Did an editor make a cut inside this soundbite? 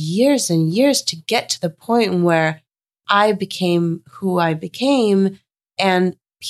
no; 0 cuts

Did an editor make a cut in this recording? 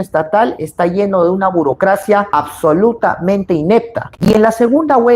yes; 1 cut; at 4.1 s

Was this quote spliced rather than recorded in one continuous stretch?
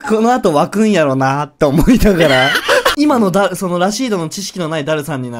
yes; 1 cut; at 2.9 s

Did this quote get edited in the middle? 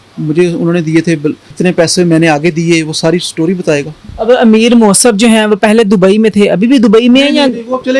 yes; 2 cuts; at 1.5 s, 4.0 s

